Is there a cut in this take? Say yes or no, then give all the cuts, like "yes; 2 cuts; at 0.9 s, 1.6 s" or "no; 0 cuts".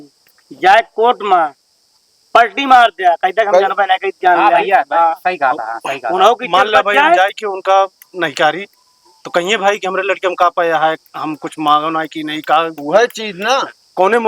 no; 0 cuts